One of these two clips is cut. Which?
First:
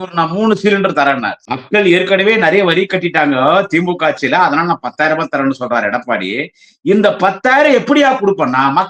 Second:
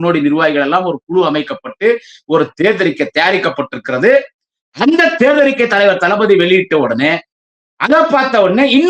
first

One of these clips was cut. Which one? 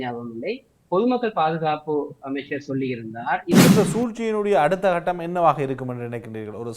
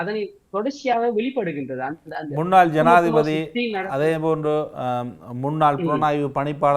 first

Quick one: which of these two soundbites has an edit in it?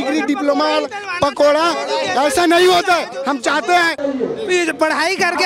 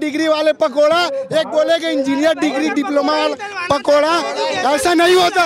first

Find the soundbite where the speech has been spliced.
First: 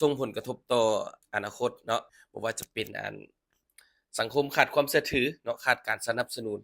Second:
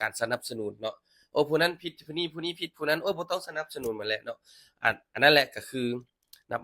first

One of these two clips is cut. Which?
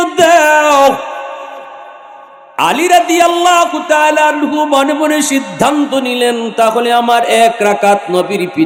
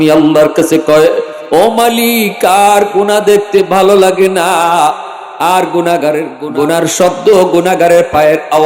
second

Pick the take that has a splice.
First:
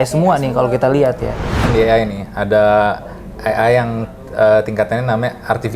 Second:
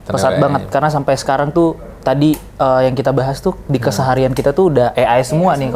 first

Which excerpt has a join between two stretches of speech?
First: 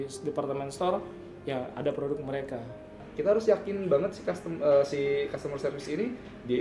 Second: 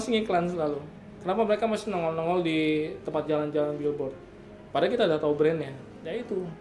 first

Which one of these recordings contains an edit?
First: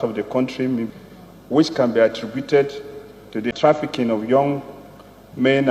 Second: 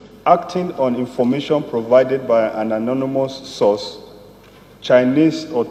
first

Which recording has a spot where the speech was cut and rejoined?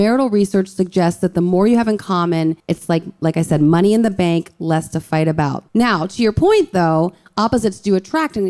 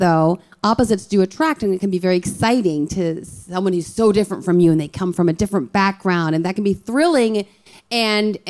first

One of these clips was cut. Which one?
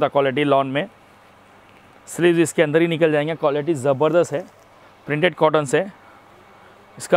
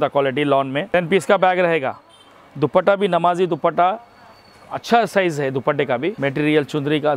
second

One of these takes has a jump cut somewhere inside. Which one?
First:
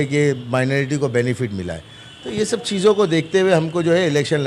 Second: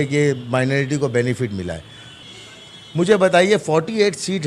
second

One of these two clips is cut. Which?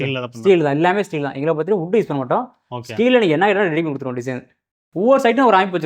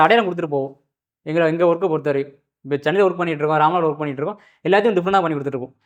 first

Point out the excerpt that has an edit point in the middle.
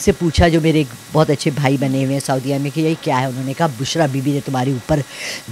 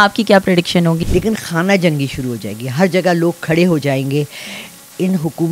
second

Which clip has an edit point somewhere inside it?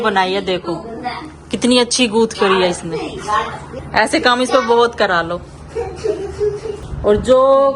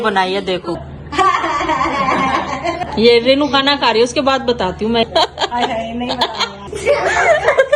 second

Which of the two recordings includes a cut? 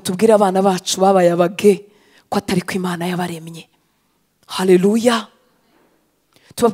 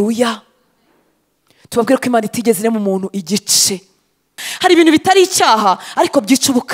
second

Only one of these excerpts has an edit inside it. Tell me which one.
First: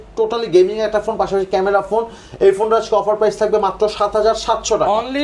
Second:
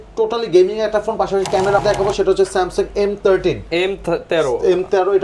second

